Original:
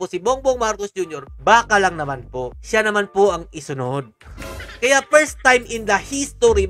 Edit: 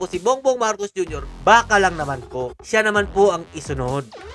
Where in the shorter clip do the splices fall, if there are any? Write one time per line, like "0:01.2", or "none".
none